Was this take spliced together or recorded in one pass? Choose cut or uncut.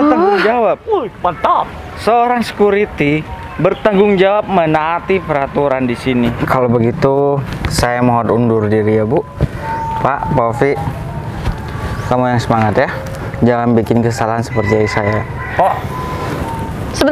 cut